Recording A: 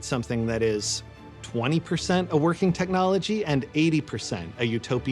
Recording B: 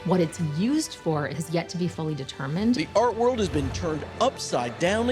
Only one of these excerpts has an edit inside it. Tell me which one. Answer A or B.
B